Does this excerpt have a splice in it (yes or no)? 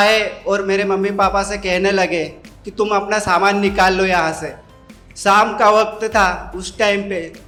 no